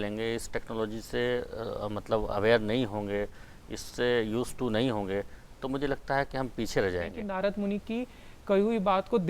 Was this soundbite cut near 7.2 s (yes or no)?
yes